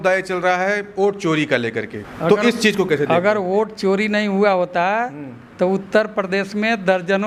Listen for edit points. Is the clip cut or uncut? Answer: uncut